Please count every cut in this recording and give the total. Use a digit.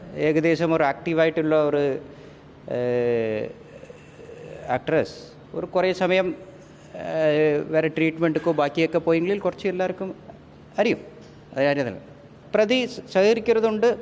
1